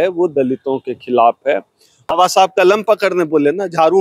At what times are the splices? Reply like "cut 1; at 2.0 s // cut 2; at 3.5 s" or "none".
cut 1; at 2.0 s

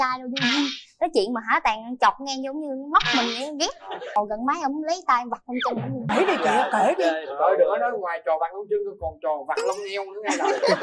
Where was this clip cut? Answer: cut 1; at 4.1 s // cut 2; at 6.1 s

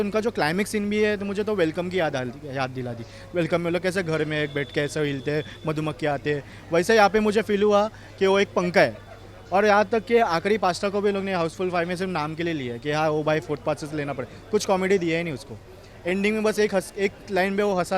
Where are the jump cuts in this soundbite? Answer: none

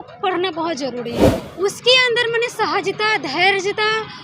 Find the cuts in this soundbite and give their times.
cut 1; at 1.4 s

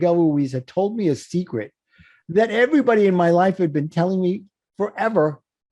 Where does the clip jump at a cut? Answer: none

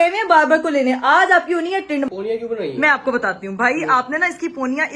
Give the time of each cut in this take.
cut 1; at 2.1 s

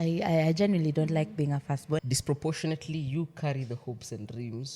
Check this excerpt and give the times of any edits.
cut 1; at 2.0 s

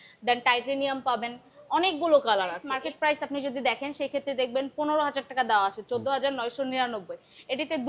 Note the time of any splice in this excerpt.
cut 1; at 2.7 s

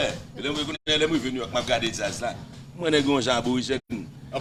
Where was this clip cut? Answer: none

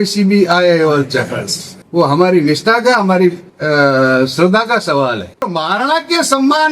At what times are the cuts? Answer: cut 1; at 5.5 s

